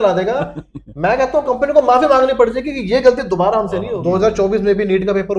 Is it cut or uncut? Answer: cut